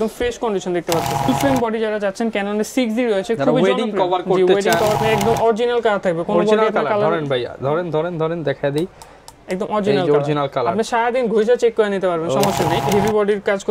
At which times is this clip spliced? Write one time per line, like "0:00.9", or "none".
0:01.3
0:04.9
0:12.8

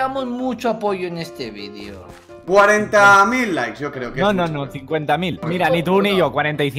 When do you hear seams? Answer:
0:02.4
0:05.5

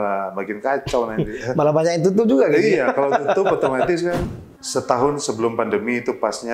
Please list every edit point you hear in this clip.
0:04.3

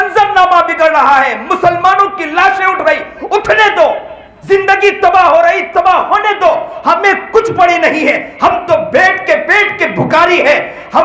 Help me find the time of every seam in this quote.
none

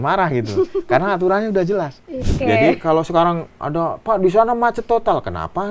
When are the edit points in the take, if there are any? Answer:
0:02.3

